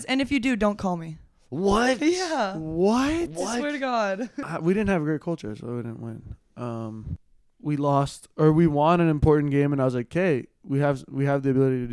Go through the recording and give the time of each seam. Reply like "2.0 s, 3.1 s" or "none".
4.4 s, 7.2 s